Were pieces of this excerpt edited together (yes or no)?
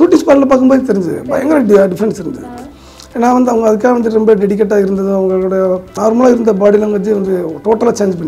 yes